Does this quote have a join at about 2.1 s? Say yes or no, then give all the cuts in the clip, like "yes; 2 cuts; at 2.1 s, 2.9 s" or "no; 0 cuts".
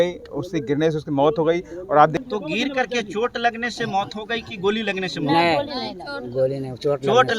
yes; 1 cut; at 2.1 s